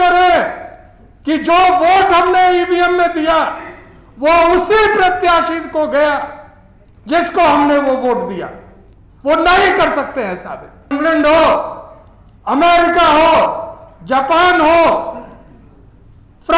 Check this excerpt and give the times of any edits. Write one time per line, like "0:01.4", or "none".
0:10.9